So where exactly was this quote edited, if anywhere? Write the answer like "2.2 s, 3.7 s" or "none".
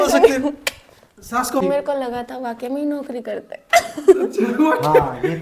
1.6 s